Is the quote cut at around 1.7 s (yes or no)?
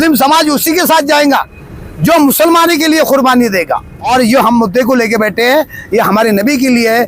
no